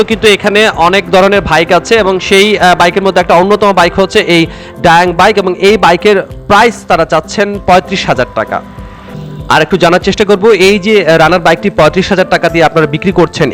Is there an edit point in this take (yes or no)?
no